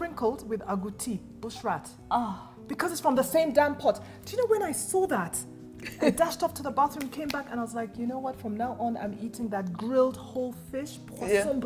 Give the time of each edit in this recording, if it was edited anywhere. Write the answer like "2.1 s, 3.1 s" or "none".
none